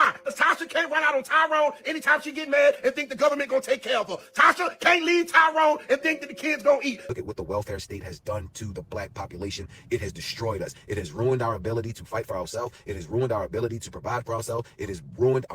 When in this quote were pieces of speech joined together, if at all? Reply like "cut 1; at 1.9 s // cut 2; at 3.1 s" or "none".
cut 1; at 7.0 s